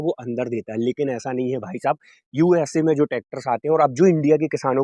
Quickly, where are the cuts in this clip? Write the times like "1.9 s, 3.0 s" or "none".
none

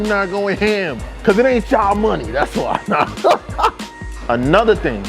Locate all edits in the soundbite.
1.0 s, 4.1 s

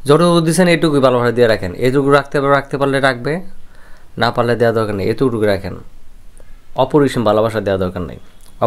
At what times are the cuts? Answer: none

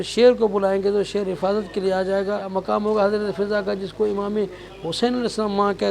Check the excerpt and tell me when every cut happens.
2.5 s

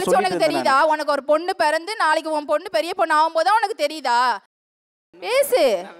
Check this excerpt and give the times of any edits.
4.5 s

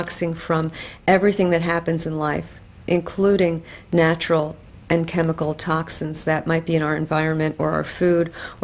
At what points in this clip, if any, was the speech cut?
5.1 s

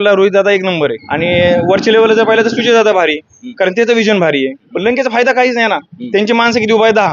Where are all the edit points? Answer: 1.0 s, 4.6 s

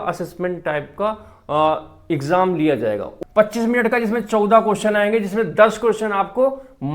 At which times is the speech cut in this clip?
3.1 s

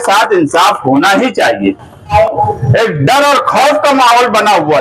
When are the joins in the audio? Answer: 2.1 s

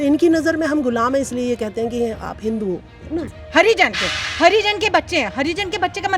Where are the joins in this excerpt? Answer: 3.4 s

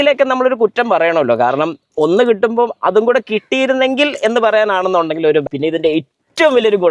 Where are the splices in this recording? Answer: 5.4 s

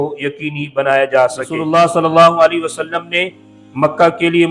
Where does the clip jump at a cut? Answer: 1.5 s

